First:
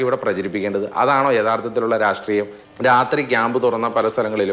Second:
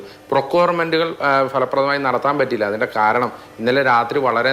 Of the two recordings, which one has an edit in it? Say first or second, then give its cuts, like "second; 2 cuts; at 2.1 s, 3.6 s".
first; 1 cut; at 2.6 s